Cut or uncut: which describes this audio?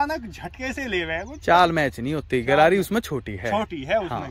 uncut